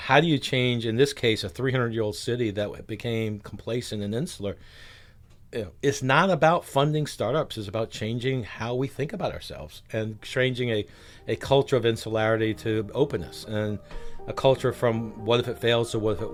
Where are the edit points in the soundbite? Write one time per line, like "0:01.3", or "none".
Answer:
none